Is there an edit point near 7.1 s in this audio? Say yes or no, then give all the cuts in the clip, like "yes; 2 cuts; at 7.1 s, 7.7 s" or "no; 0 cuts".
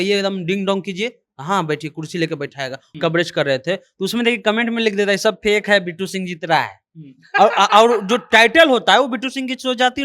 no; 1 cut; at 2.8 s